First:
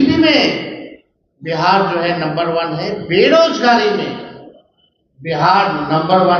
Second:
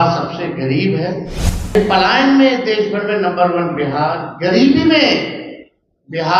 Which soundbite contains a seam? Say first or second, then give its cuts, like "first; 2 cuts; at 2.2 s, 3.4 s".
second; 1 cut; at 1.7 s